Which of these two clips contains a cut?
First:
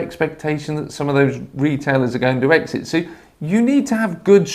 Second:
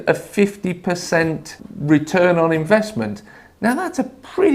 second; 1 cut; at 1.6 s

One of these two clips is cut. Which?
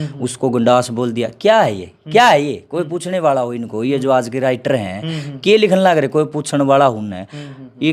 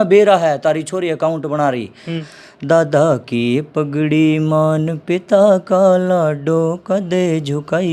second; 1 cut; at 2.1 s

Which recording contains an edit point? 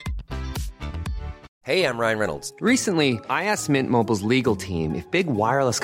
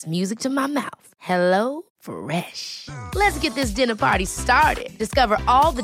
first; 1 cut; at 1.4 s

